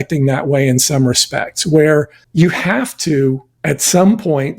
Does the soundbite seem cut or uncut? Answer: cut